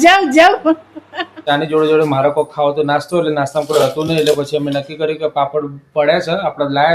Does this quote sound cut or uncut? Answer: cut